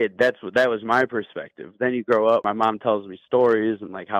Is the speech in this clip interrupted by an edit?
yes; 1 cut; at 2.4 s

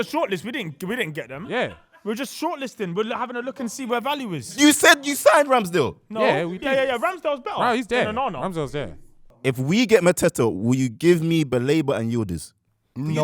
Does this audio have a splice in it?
yes; 1 cut; at 9.3 s

